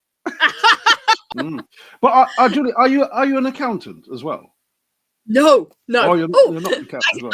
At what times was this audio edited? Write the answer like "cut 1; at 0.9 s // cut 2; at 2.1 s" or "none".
cut 1; at 1.3 s